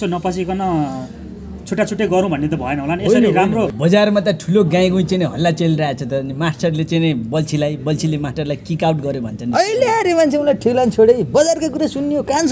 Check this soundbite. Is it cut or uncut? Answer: cut